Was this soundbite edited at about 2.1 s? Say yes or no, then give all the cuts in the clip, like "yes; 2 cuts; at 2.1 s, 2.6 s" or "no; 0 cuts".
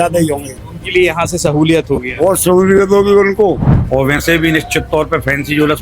no; 1 cut; at 3.7 s